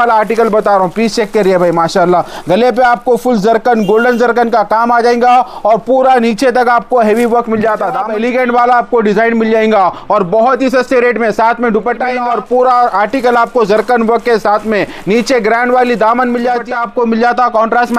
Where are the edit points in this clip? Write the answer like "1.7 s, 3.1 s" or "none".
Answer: 8.1 s, 12.2 s, 16.6 s